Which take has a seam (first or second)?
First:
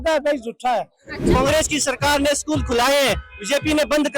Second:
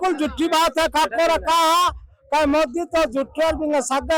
first